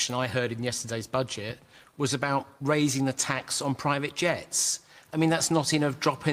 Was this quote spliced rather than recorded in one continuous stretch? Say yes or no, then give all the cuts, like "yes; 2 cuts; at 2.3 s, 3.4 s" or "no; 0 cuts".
yes; 1 cut; at 2.5 s